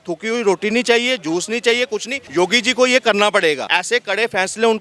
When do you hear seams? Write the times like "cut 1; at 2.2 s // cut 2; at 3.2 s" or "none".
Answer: cut 1; at 2.2 s // cut 2; at 3.7 s